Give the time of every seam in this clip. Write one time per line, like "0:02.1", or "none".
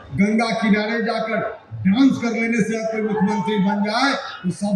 none